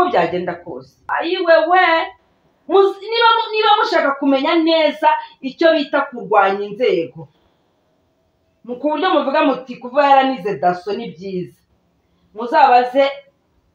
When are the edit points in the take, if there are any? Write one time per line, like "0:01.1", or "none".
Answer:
0:01.1

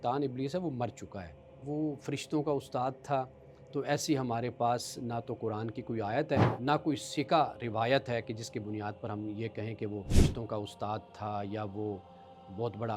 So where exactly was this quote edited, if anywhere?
0:01.6
0:06.5
0:10.1

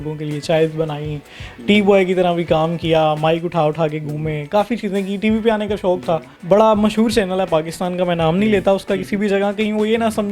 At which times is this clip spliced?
0:06.3

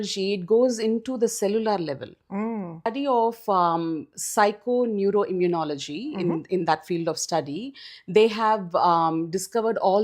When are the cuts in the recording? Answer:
0:02.9

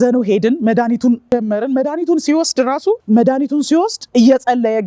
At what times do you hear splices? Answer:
0:01.3
0:03.0

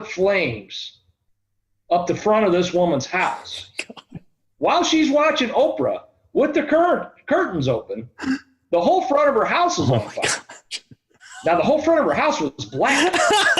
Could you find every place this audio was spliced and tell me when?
0:11.2

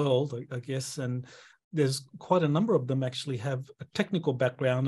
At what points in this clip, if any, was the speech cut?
0:01.6

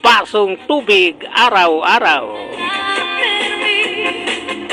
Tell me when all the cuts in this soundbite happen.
none

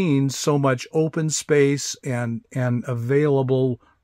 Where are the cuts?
none

